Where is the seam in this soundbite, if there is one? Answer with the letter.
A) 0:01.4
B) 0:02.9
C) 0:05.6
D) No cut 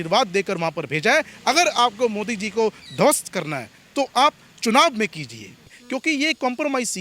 C